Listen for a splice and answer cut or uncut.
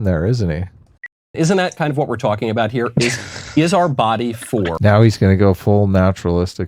cut